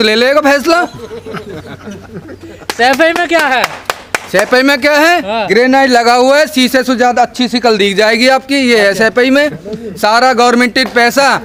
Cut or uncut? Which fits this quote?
uncut